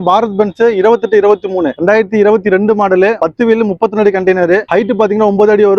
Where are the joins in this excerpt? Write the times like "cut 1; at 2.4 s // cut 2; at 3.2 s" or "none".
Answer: none